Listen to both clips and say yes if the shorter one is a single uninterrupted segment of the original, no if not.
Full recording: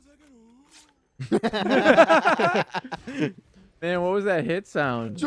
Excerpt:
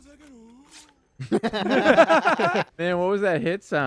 no